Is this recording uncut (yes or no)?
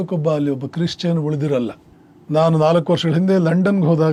yes